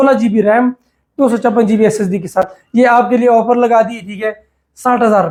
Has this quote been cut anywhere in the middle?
no; 0 cuts

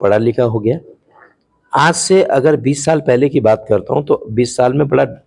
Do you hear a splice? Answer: no; 0 cuts

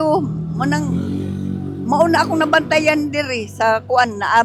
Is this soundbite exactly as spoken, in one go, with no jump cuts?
yes; 0 cuts

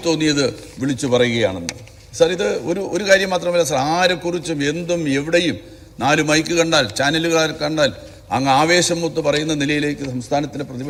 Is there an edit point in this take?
no; 0 cuts

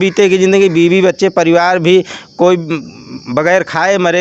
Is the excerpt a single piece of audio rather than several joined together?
yes; 0 cuts

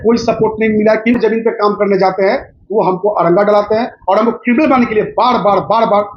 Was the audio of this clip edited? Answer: yes; 1 cut; at 1.2 s

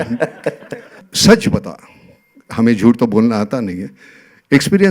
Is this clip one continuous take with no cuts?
no; 1 cut; at 1.0 s

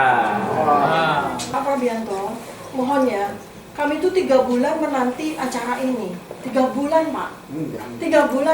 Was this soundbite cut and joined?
yes; 1 cut; at 1.4 s

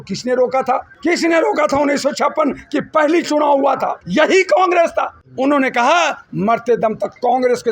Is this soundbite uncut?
no; 3 cuts; at 0.9 s, 4.0 s, 5.2 s

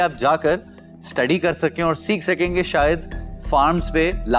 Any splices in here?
no; 0 cuts

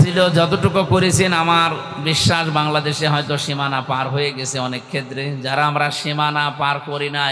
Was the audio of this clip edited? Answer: no; 0 cuts

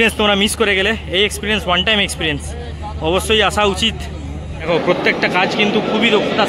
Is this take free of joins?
no; 1 cut; at 4.7 s

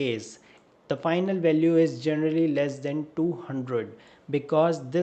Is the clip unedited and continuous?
yes; 0 cuts

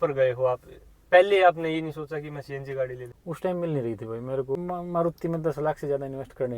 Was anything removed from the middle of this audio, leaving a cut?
yes; 2 cuts; at 3.1 s, 4.6 s

